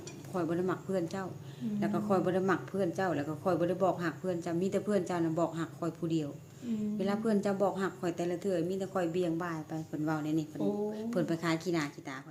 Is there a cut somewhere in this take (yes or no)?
no